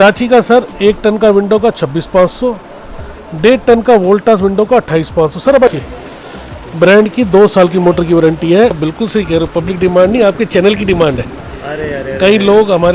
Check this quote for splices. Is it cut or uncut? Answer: cut